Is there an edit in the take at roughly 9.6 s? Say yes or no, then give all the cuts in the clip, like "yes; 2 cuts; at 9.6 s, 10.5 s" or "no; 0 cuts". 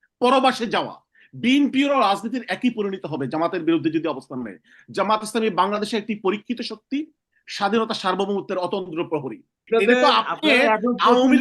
yes; 1 cut; at 9.6 s